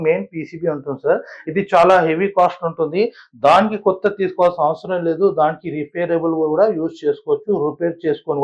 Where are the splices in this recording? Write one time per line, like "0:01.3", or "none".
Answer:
none